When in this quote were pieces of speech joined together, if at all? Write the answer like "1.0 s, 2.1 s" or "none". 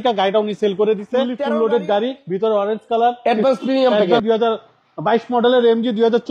1.4 s, 4.2 s